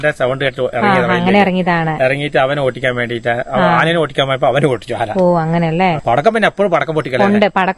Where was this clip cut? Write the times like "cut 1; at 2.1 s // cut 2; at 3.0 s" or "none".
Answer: cut 1; at 6.0 s